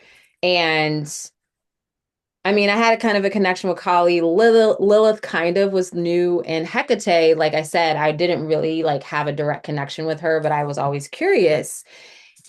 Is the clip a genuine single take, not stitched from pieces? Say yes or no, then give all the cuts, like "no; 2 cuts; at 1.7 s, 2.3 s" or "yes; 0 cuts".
yes; 0 cuts